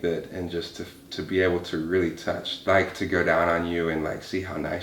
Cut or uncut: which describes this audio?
cut